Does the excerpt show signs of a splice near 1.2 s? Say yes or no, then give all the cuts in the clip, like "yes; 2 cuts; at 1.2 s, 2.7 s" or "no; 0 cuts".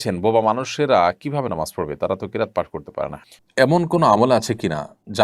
no; 1 cut; at 3.3 s